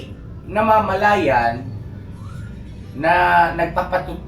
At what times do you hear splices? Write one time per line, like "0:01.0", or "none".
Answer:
none